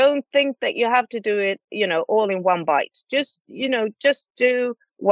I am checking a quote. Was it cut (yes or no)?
no